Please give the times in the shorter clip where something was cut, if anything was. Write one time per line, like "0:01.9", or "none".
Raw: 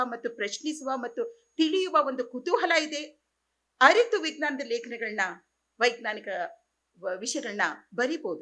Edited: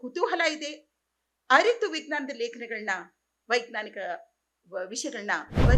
none